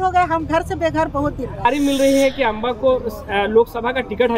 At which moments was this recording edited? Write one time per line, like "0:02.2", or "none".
0:01.6